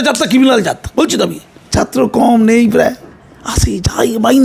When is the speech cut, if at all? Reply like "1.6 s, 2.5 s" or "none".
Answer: 1.7 s